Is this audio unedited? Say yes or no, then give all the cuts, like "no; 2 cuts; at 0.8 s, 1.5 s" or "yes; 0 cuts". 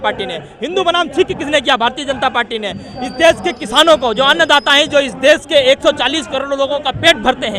yes; 0 cuts